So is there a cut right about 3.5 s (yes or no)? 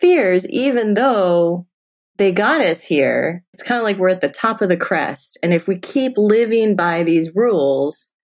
yes